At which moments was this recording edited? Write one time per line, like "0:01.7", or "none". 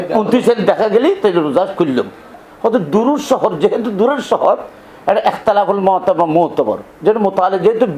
0:02.4